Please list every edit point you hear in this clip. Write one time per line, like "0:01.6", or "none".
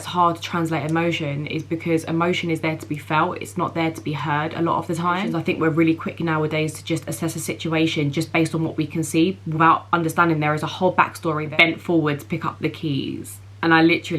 0:05.3
0:11.4